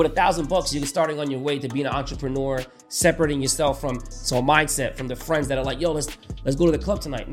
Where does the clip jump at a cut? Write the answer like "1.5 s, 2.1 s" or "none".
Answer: none